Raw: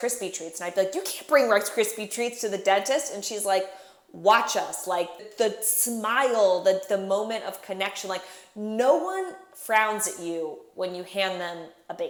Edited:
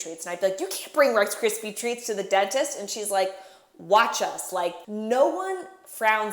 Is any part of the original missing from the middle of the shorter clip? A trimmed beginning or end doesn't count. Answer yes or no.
yes